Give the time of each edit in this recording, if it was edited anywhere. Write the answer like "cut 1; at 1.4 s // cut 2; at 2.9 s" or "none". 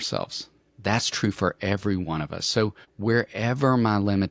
cut 1; at 2.9 s